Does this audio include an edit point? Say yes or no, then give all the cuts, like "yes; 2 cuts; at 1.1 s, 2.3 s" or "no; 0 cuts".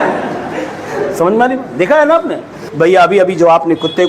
yes; 1 cut; at 2.7 s